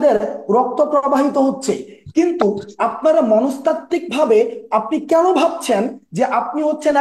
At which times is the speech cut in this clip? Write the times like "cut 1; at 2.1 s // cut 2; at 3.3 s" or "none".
none